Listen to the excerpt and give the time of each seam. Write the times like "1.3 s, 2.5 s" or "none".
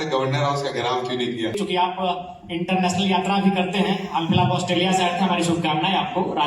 1.5 s